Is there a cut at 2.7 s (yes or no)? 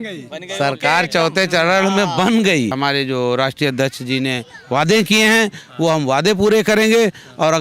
yes